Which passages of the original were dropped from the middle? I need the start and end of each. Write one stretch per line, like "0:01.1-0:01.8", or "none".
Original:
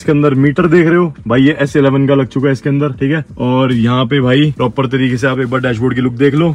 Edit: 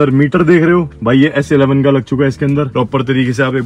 0:02.9-0:04.5